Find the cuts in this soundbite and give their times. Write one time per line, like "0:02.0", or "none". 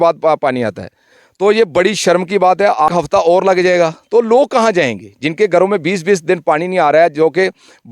0:02.9